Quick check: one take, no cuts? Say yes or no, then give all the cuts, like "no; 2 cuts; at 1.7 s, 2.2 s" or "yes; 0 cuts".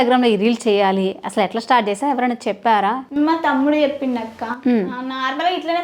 no; 1 cut; at 3.0 s